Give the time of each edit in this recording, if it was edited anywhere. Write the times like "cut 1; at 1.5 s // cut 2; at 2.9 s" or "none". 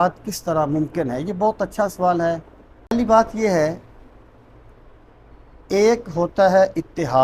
cut 1; at 2.9 s